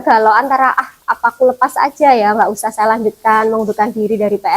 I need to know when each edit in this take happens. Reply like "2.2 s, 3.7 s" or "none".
none

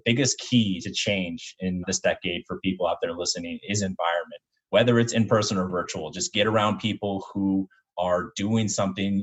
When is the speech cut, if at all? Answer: 1.8 s

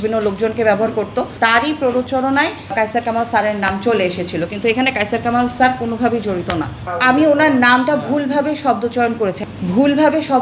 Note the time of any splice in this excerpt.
1.3 s, 6.8 s, 9.4 s

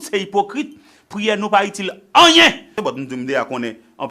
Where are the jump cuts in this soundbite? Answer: 2.8 s

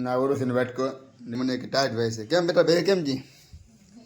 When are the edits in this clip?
1.3 s

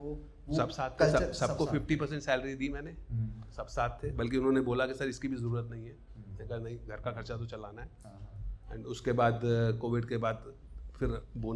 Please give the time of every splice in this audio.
none

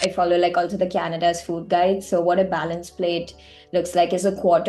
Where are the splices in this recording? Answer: none

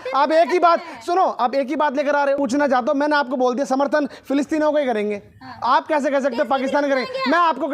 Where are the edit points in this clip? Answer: 2.4 s

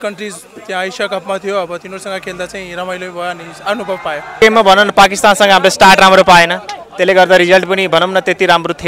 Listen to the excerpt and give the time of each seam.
4.3 s

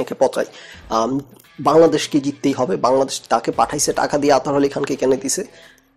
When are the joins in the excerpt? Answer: none

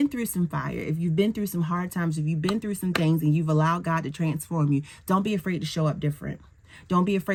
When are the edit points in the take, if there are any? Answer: none

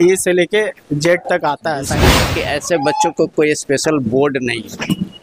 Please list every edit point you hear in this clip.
2.2 s

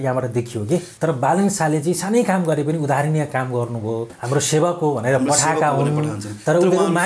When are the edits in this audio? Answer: 0.9 s, 4.1 s

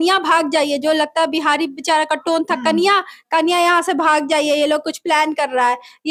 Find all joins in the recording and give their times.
none

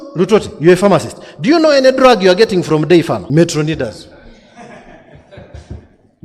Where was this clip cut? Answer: 3.2 s

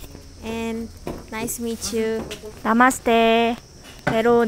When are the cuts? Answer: 2.4 s

